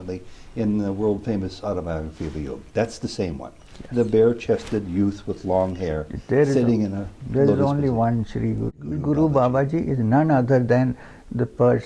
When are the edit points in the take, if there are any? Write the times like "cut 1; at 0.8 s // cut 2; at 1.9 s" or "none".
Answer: cut 1; at 8.9 s